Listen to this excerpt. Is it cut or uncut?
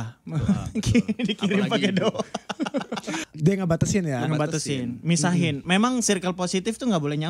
cut